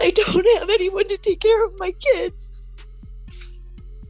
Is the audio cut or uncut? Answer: uncut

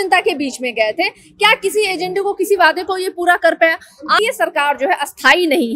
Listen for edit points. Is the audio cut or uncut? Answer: cut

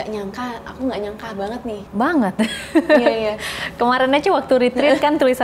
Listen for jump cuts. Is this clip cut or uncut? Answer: cut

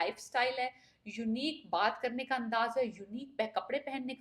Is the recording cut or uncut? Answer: uncut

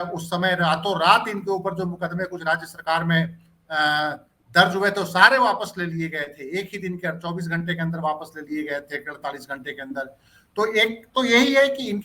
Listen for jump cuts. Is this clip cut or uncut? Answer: uncut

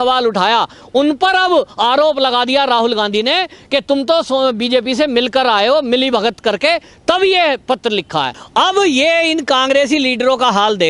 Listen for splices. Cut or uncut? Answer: cut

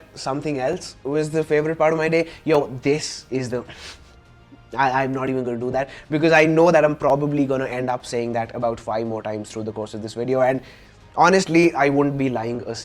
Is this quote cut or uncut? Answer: uncut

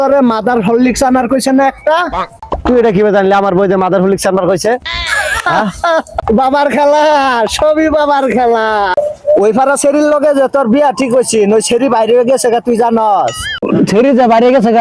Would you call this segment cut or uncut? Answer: cut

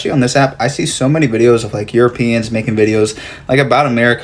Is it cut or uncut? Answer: uncut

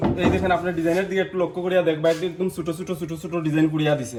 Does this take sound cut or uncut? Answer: uncut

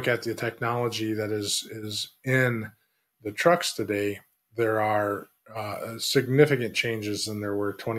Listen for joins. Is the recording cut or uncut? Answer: uncut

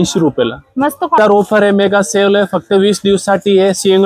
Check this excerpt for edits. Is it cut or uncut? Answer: cut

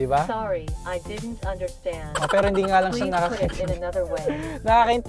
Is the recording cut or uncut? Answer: uncut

